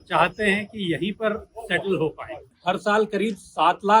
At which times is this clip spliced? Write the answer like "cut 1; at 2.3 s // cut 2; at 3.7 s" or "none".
cut 1; at 2.5 s